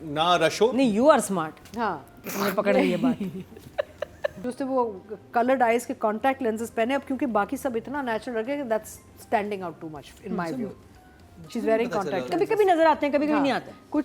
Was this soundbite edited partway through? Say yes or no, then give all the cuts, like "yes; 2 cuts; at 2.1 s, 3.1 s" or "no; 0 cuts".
yes; 1 cut; at 4.4 s